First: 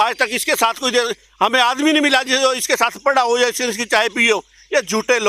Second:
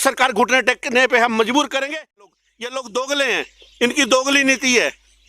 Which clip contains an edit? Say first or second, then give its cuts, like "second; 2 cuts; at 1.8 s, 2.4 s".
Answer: second; 1 cut; at 2.3 s